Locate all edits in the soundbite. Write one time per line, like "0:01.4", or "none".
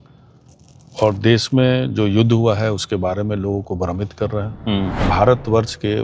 0:05.0